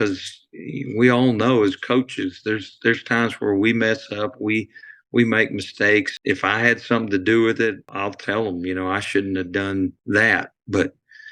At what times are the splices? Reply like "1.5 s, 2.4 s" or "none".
6.1 s, 7.9 s, 10.0 s